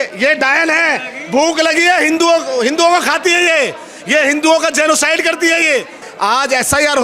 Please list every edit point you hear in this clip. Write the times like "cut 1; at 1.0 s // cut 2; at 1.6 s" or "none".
cut 1; at 6.1 s